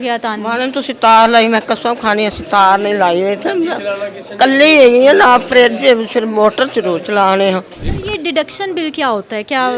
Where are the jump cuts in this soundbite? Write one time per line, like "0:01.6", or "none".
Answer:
0:07.8